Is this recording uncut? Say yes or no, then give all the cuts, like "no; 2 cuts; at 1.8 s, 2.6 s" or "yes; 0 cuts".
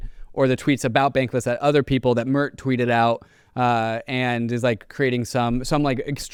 yes; 0 cuts